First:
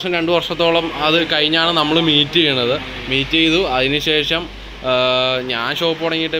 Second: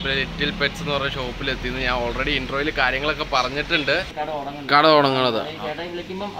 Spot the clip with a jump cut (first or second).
second